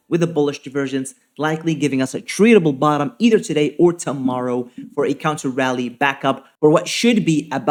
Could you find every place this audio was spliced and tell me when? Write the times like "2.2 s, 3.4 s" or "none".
none